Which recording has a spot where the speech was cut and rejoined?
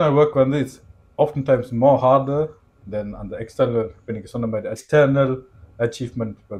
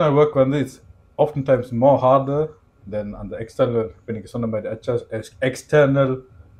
first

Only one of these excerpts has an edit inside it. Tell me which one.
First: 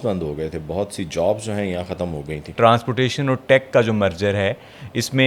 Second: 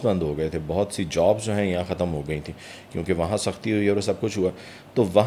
first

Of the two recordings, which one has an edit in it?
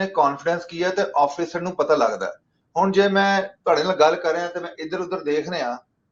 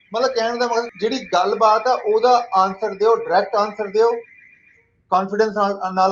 second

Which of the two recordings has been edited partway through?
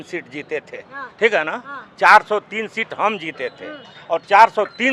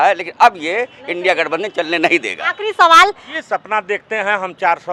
second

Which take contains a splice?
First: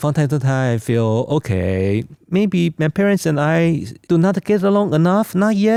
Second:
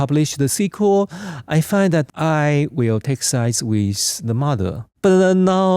second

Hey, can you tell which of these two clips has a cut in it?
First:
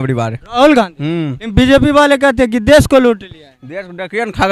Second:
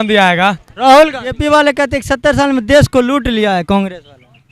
second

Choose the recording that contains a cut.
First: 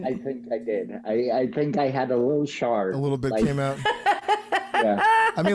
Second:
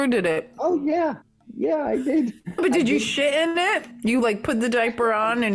second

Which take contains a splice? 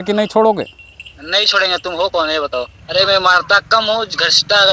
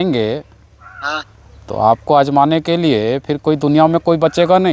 first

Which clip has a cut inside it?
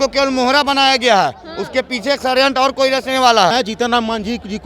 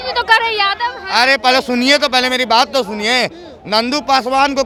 first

